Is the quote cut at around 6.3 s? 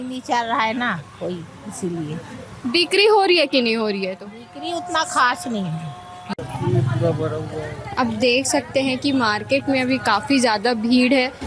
yes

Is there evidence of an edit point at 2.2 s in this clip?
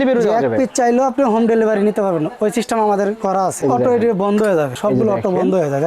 no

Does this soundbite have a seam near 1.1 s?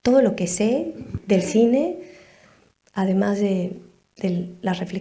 yes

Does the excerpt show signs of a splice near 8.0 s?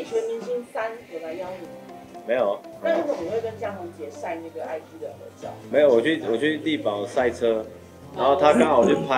no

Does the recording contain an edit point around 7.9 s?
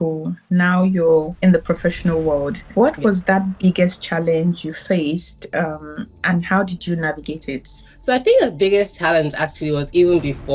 yes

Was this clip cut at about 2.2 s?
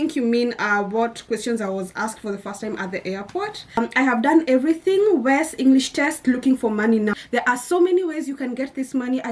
no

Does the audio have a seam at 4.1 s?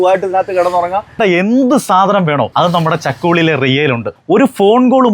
yes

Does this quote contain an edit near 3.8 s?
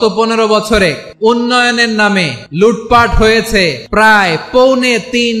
yes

